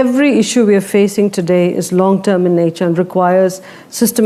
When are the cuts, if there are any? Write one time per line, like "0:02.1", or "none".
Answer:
none